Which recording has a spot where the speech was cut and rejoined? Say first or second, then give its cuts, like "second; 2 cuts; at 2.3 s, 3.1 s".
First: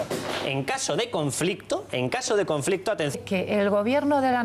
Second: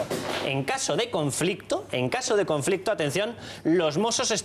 second; 1 cut; at 3.1 s